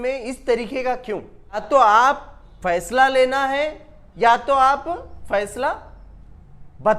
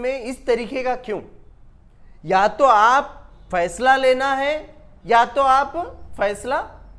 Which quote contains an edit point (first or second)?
first